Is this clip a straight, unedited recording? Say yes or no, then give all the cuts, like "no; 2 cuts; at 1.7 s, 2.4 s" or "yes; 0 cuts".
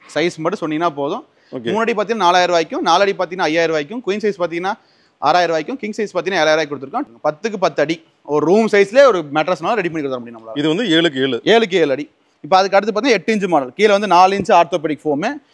no; 3 cuts; at 1.4 s, 7.0 s, 12.3 s